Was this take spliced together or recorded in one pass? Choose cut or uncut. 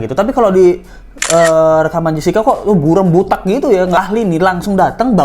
cut